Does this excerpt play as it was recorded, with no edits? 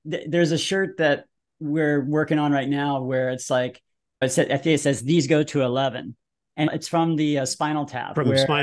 no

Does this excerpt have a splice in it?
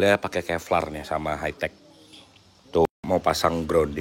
yes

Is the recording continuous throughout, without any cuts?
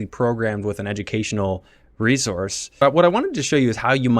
no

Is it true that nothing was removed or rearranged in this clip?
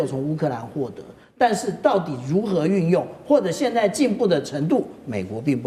yes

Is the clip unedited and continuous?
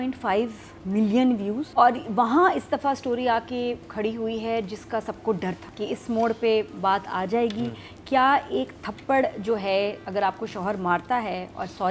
no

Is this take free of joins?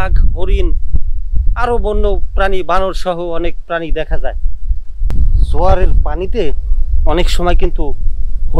no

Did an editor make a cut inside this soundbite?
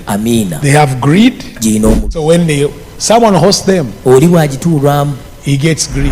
yes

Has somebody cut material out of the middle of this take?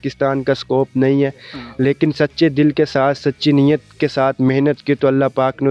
no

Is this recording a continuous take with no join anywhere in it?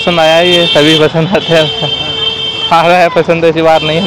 yes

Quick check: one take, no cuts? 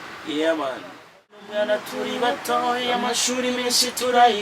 no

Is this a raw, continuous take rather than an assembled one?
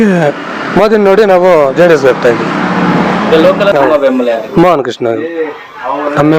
no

